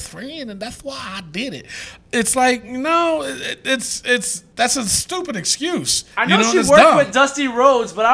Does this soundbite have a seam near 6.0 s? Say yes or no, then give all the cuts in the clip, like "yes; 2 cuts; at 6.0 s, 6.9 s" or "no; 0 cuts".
yes; 2 cuts; at 4.4 s, 6.0 s